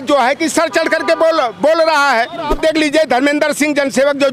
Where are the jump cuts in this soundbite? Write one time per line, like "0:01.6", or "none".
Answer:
0:02.5